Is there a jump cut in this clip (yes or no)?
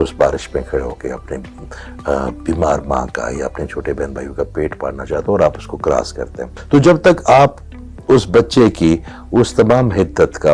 no